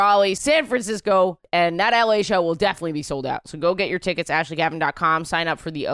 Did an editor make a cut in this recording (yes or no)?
no